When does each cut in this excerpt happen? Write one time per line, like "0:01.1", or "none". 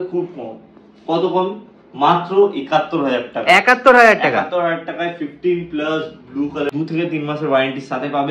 0:06.7